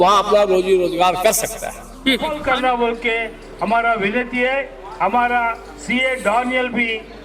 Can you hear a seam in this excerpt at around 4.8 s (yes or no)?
no